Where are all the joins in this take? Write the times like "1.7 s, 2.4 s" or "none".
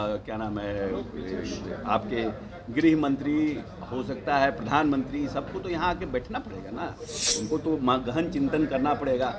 none